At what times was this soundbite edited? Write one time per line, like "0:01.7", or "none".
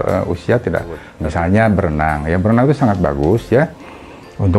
0:01.1